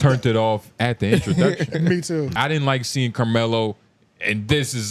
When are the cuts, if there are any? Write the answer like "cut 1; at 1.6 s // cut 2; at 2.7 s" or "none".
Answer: cut 1; at 2.3 s